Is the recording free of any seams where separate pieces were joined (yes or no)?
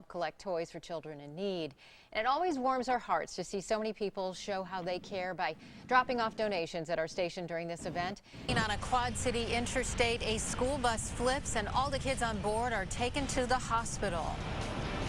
no